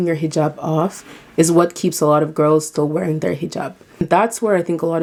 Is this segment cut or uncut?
uncut